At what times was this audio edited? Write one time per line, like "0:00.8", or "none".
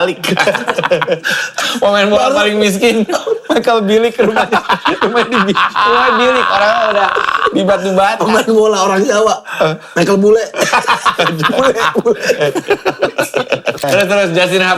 0:13.8